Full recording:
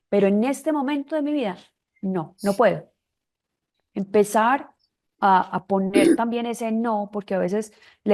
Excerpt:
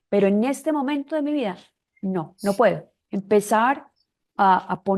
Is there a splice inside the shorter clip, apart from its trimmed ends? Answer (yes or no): yes